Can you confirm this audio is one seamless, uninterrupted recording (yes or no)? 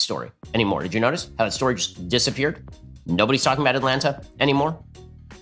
yes